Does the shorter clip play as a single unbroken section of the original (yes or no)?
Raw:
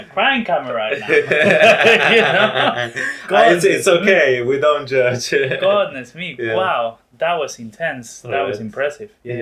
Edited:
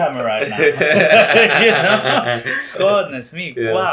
no